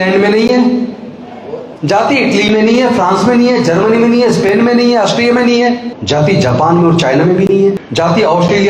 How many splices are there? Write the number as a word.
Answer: two